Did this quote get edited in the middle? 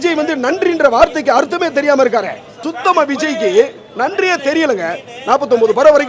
yes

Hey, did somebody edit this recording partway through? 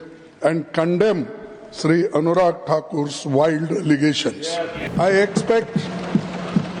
yes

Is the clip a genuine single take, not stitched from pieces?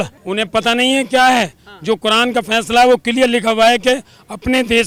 yes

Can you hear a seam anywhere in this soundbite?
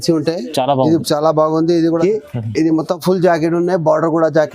yes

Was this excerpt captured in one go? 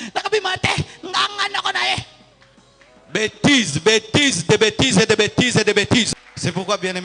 no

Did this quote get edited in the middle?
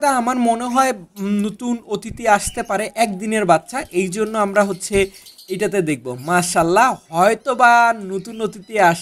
no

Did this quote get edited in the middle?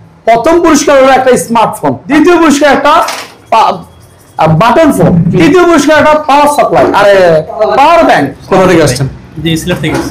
yes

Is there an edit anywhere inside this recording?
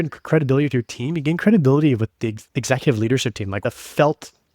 yes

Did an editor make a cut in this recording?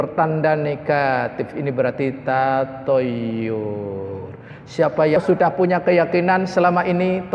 yes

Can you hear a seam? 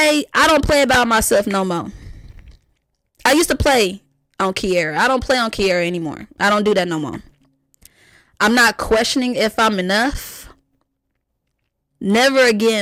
no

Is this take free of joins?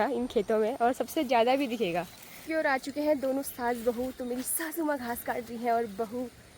no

